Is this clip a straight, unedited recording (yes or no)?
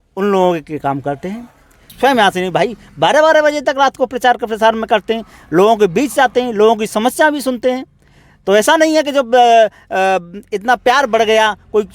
no